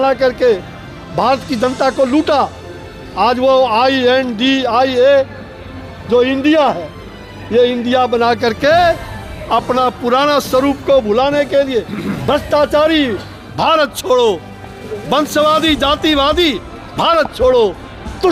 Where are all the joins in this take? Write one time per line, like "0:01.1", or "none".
none